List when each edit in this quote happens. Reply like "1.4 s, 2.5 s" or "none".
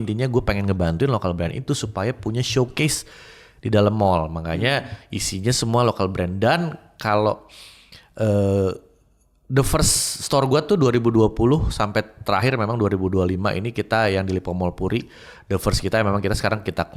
none